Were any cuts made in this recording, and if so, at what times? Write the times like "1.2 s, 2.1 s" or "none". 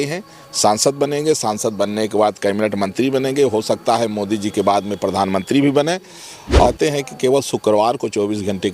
6.7 s